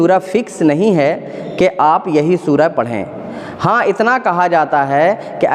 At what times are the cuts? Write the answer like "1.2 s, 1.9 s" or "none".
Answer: none